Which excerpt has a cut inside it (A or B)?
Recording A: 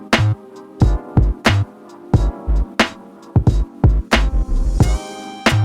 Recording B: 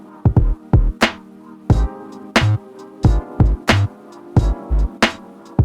A